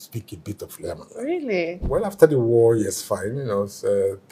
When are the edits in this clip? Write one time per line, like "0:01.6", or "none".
0:01.8